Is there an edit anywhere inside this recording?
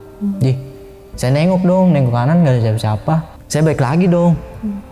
yes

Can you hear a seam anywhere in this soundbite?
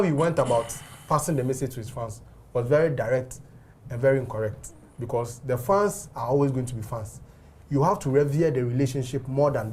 no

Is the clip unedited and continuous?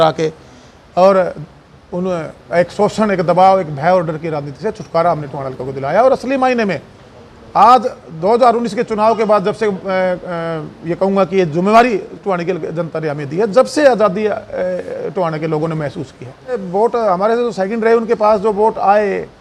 no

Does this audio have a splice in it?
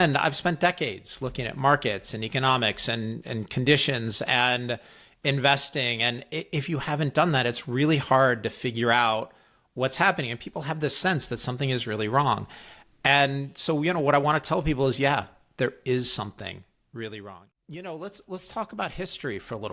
yes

